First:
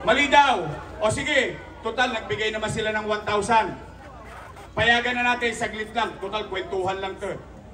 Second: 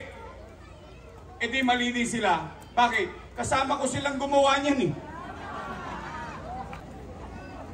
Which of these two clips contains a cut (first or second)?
second